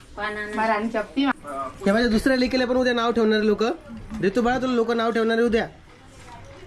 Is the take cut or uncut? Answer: cut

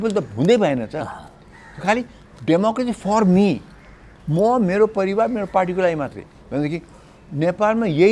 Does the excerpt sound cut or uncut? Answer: uncut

